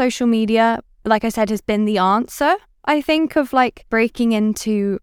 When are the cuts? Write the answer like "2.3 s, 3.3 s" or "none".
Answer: 0.9 s, 3.8 s